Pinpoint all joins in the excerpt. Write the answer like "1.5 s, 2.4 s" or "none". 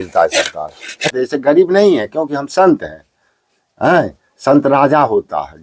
1.1 s